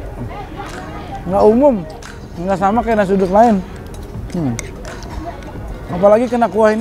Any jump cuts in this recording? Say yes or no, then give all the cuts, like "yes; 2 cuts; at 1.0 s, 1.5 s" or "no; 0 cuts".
no; 0 cuts